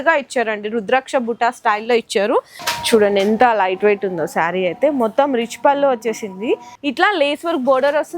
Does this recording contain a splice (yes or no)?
yes